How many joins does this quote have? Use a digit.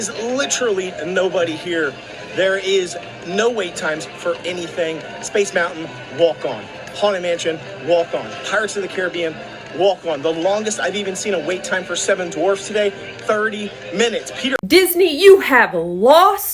1